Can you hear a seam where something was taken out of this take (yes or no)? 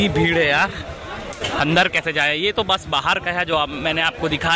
no